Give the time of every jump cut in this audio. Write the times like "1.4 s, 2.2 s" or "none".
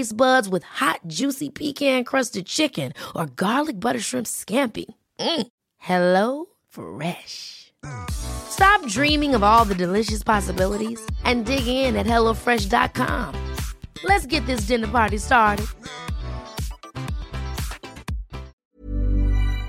18.5 s